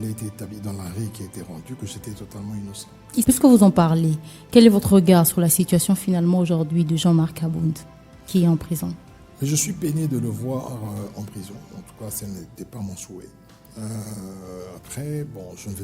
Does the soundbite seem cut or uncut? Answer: cut